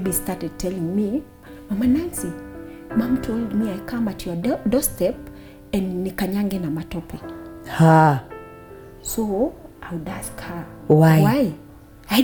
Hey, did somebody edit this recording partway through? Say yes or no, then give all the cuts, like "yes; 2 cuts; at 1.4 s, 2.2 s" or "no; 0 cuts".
no; 0 cuts